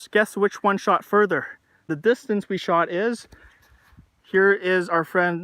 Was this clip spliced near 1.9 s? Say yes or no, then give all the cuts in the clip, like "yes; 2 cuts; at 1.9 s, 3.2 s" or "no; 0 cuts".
yes; 1 cut; at 1.9 s